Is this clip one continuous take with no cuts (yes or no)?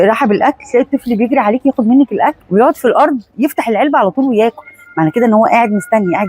no